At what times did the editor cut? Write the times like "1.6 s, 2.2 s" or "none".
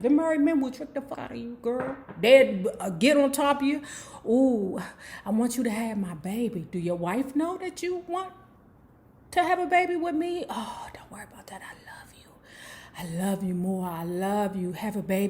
1.2 s